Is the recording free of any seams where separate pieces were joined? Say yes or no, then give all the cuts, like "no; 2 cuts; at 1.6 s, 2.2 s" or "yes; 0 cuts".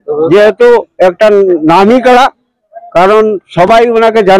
yes; 0 cuts